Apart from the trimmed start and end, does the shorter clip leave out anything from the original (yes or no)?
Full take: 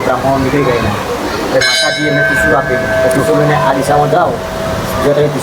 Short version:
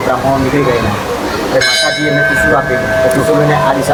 no